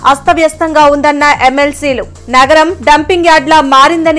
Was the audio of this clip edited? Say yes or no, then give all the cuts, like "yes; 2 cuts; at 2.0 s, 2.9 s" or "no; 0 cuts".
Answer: no; 0 cuts